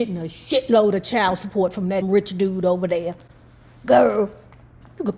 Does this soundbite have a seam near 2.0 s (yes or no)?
yes